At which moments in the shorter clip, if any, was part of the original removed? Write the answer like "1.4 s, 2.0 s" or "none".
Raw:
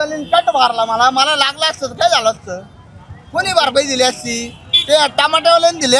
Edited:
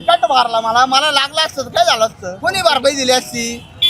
2.3 s